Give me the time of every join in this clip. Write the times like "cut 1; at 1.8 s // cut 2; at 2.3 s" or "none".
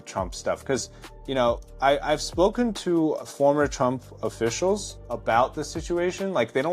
cut 1; at 1.7 s // cut 2; at 3.3 s // cut 3; at 4.9 s